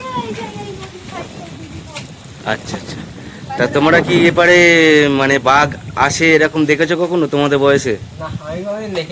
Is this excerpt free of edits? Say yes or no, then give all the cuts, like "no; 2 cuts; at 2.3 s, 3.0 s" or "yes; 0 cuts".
yes; 0 cuts